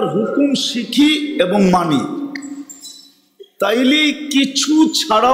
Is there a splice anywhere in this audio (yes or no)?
no